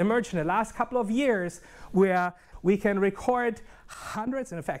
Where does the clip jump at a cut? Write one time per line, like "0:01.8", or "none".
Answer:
0:02.5